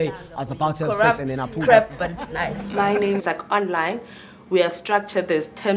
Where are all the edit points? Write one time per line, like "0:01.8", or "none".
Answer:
none

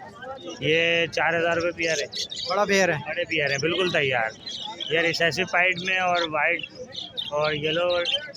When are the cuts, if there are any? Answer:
none

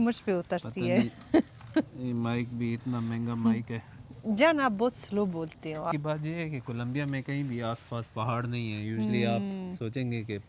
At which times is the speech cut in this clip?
0:05.9

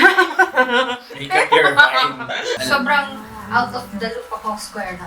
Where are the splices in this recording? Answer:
0:02.6

